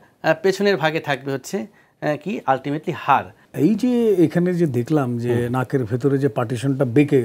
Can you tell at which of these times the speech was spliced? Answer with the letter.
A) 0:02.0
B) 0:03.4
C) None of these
B